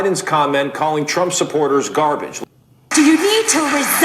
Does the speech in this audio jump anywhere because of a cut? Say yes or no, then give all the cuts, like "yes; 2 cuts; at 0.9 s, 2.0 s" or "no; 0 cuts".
yes; 1 cut; at 2.3 s